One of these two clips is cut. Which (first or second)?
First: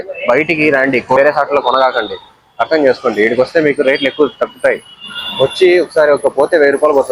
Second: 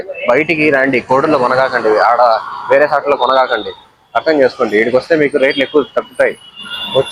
first